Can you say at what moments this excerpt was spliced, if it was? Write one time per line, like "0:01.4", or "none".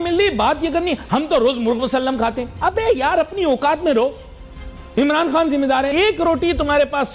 none